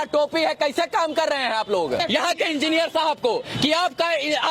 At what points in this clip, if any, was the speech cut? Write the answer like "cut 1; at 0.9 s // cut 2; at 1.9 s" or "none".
cut 1; at 2.0 s